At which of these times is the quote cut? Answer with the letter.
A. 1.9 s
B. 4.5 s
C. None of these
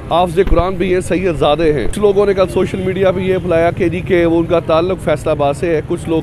A